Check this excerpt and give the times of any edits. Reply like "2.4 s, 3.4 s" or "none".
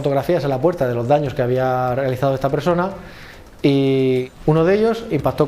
4.3 s